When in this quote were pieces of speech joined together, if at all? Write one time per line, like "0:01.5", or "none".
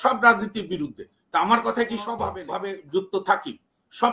0:02.4